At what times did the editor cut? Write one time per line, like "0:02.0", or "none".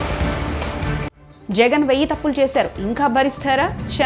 none